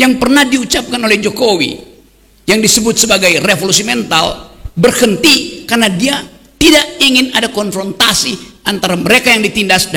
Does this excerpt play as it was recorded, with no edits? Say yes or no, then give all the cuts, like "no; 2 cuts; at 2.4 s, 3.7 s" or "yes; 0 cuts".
yes; 0 cuts